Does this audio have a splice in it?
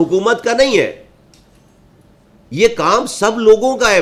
no; 0 cuts

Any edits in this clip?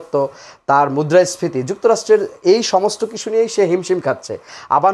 no; 0 cuts

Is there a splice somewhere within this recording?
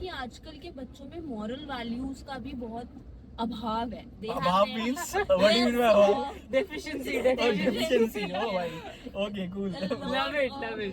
no; 0 cuts

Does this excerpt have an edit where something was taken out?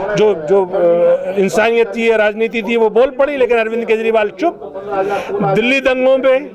no; 0 cuts

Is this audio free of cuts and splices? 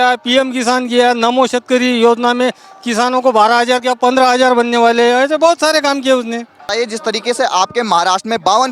no; 1 cut; at 6.6 s

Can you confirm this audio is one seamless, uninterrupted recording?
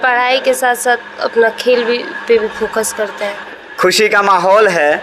no; 1 cut; at 3.4 s

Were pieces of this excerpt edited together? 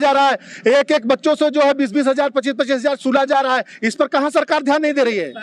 no; 0 cuts

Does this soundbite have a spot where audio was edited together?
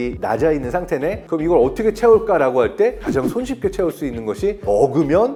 no; 0 cuts

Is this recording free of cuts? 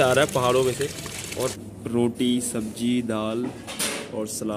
no; 1 cut; at 1.6 s

